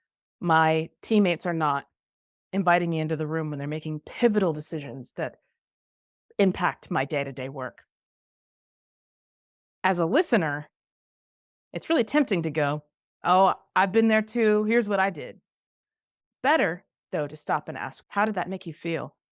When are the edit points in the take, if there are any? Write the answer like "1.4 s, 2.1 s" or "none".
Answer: 17.9 s